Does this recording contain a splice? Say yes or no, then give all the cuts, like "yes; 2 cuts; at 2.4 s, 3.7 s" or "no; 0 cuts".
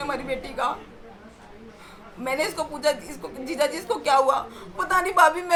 no; 0 cuts